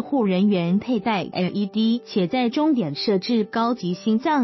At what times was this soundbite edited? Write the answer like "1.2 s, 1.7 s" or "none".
2.1 s